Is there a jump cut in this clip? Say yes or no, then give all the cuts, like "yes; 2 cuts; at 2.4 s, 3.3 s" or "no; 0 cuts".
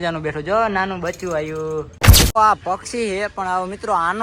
yes; 1 cut; at 2.4 s